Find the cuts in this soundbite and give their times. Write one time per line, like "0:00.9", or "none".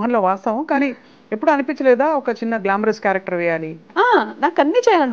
0:03.8